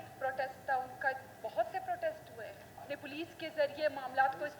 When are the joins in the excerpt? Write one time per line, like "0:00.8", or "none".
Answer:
0:02.9

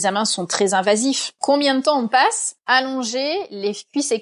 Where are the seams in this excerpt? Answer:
0:01.3
0:02.5

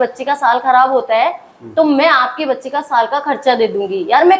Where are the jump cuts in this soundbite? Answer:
none

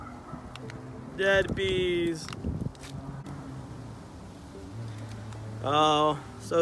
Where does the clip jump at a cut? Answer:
0:03.2

